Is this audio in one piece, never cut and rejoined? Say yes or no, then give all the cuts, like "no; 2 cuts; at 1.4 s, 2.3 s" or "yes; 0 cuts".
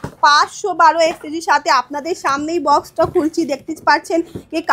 yes; 0 cuts